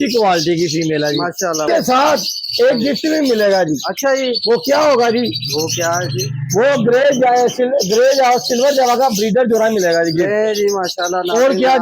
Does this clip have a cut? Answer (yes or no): yes